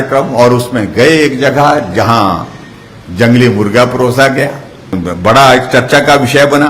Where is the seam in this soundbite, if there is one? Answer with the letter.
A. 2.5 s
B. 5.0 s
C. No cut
B